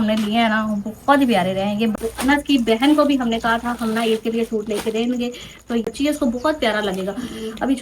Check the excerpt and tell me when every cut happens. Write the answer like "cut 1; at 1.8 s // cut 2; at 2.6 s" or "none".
cut 1; at 1.9 s // cut 2; at 5.9 s

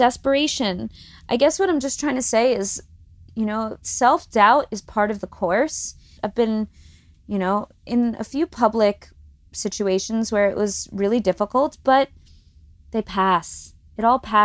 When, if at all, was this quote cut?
cut 1; at 6.2 s

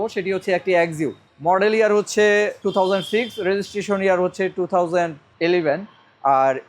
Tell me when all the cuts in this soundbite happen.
cut 1; at 1.3 s // cut 2; at 2.6 s

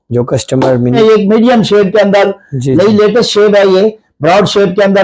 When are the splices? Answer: cut 1; at 1.0 s

